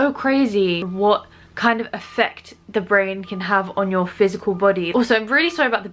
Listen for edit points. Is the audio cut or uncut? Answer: cut